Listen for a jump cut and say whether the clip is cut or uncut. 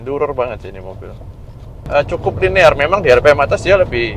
cut